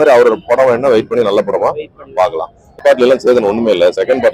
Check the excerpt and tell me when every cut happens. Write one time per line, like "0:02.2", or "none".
0:02.6